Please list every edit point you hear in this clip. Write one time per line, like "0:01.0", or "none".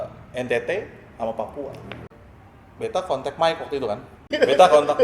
0:02.2
0:04.1

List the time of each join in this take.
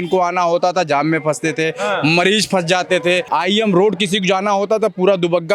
0:03.2

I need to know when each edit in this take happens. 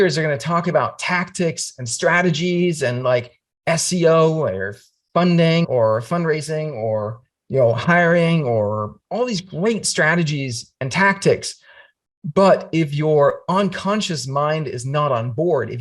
0:05.7
0:08.9

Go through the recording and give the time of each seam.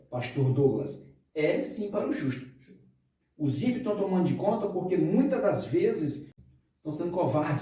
0:06.3

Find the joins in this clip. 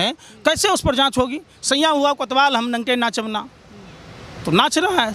none

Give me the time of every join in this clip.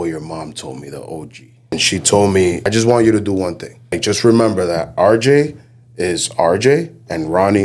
0:01.7
0:02.6
0:04.0

